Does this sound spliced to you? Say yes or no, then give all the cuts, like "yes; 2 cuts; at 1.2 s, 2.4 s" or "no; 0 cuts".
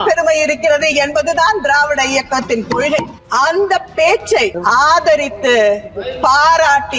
yes; 2 cuts; at 3.2 s, 4.6 s